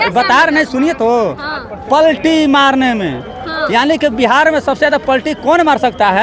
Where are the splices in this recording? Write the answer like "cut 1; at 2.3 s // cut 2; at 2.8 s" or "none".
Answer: none